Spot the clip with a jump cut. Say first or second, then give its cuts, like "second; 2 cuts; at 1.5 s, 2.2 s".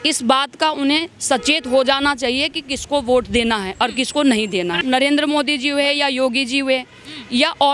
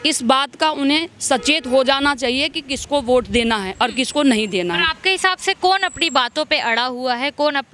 first; 1 cut; at 4.8 s